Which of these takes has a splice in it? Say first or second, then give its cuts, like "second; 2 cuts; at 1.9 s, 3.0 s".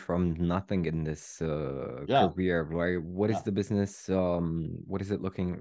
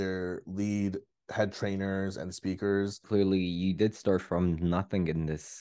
second; 1 cut; at 3.0 s